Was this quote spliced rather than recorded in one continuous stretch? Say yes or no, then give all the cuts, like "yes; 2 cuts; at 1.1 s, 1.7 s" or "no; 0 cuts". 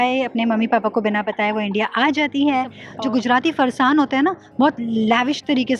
yes; 1 cut; at 2.8 s